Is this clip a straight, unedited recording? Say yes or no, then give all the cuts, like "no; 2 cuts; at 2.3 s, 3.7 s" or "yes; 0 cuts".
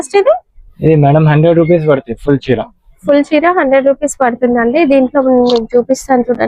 yes; 0 cuts